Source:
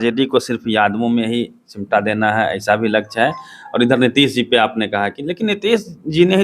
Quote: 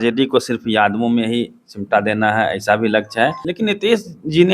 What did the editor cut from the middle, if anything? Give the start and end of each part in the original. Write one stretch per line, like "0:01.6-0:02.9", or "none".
0:03.4-0:05.3